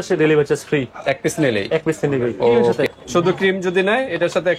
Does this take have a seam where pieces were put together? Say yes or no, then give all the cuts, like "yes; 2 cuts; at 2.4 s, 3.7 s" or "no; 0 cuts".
yes; 1 cut; at 2.8 s